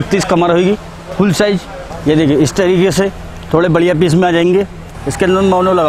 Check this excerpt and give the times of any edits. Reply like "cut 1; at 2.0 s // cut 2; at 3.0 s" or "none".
cut 1; at 1.8 s // cut 2; at 4.8 s